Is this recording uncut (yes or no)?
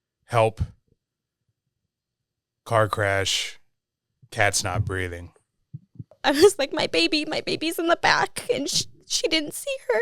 no